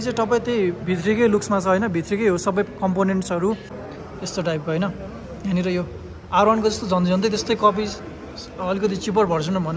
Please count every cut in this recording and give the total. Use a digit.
1